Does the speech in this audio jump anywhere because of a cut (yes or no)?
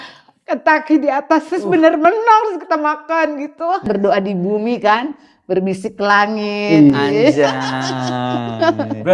yes